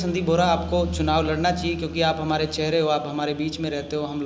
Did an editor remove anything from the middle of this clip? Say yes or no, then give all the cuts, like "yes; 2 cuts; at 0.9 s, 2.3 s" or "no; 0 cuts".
no; 0 cuts